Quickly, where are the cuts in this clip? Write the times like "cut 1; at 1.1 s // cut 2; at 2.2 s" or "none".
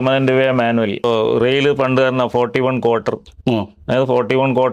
cut 1; at 1.0 s

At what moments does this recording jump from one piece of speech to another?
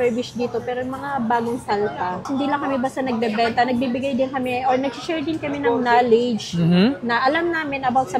cut 1; at 2.3 s

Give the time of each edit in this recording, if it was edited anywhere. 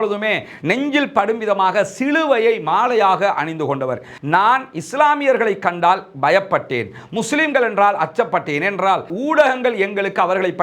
cut 1; at 4.1 s

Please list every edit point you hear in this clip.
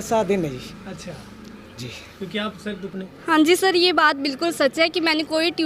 cut 1; at 2.9 s

